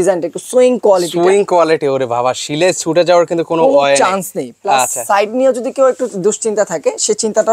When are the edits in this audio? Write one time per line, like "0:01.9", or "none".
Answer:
none